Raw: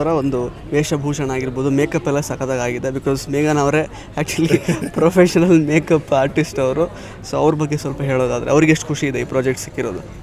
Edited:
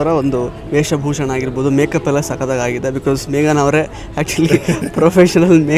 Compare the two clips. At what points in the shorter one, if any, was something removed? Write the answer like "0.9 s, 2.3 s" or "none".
none

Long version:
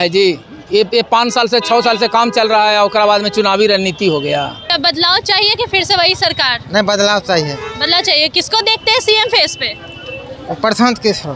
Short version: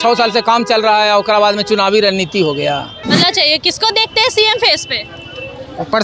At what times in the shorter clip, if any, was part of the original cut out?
2.9 s

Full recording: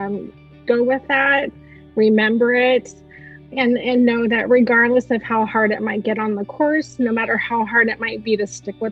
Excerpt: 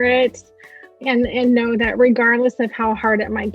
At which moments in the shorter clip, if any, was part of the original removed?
none

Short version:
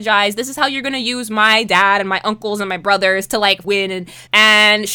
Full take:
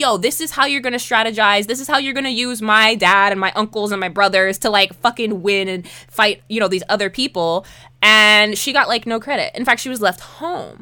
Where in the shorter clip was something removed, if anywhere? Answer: 3.9 s

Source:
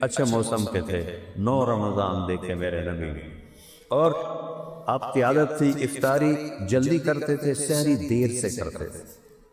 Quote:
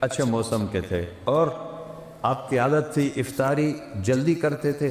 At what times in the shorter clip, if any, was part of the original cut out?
1.1 s

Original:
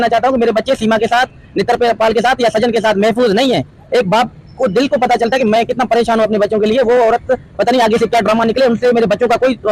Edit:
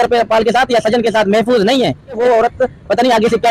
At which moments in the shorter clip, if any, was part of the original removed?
2.2 s

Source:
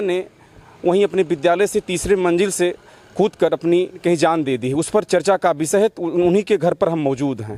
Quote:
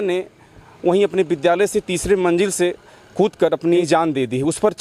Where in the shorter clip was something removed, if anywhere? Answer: 3.8 s

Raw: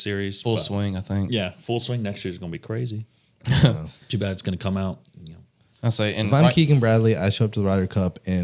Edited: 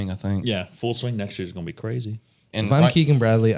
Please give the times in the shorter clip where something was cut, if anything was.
2.5 s

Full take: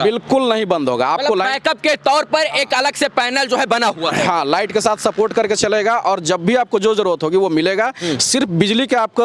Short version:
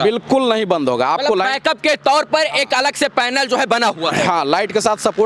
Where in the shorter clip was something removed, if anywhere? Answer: none

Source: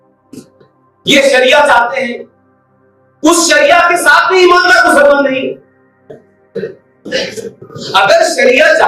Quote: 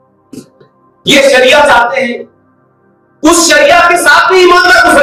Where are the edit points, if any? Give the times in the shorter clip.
none

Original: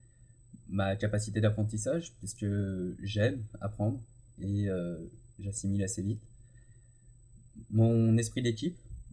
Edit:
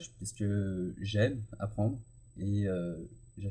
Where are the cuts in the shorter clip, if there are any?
none

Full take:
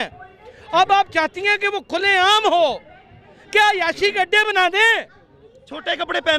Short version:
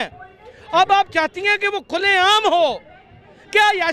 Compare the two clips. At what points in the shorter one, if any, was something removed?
none

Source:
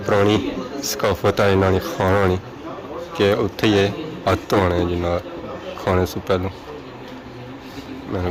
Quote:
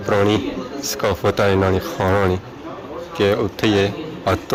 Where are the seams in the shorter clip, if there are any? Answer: none

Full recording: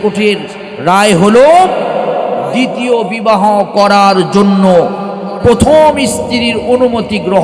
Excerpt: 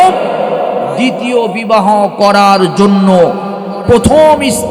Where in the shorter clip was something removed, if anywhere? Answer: none

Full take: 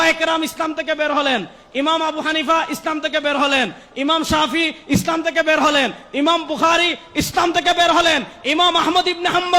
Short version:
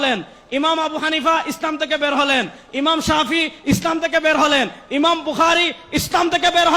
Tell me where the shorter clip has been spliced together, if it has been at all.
none

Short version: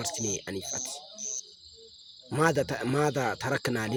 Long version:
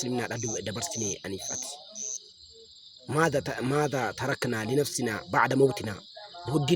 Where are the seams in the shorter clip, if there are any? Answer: none

